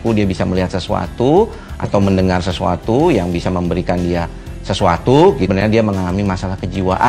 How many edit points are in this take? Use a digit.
1